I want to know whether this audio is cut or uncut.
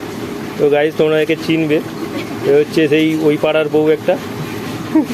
uncut